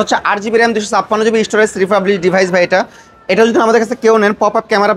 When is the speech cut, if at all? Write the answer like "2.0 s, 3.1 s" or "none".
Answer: none

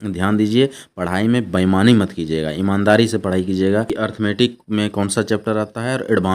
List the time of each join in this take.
3.9 s

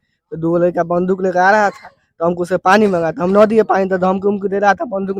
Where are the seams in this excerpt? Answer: none

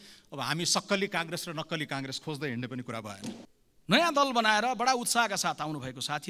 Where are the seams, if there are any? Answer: 3.5 s

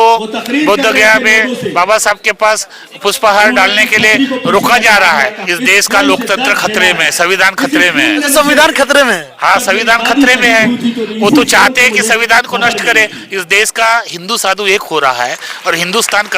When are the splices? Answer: 5.4 s

